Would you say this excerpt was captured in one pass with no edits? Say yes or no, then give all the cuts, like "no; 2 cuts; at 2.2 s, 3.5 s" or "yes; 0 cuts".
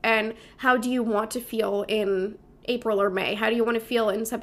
yes; 0 cuts